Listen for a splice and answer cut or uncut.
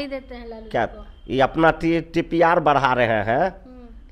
uncut